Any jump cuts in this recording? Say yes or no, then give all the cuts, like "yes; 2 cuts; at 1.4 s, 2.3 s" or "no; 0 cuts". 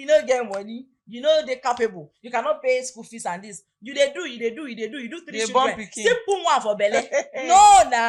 no; 0 cuts